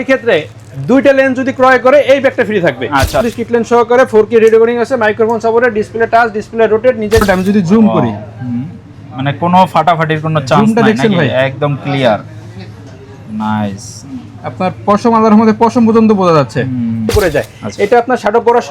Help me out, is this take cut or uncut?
cut